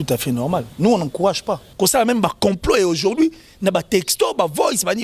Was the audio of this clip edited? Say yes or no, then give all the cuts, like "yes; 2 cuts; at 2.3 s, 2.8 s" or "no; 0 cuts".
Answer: yes; 1 cut; at 1.7 s